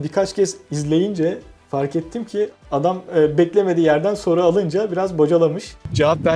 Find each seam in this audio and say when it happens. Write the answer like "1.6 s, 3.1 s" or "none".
2.6 s